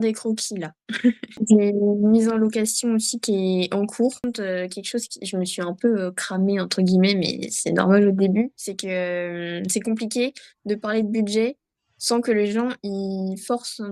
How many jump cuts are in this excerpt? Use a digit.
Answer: 2